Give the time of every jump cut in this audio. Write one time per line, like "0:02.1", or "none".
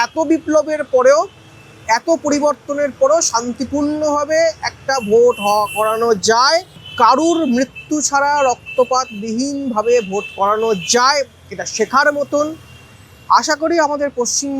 none